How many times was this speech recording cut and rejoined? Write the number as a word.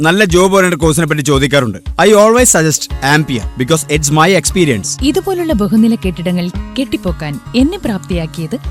zero